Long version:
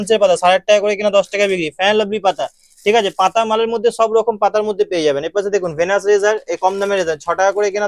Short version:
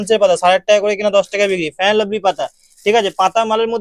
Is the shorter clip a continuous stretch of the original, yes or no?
yes